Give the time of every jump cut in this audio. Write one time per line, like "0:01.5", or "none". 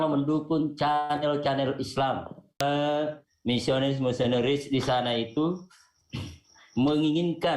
0:02.6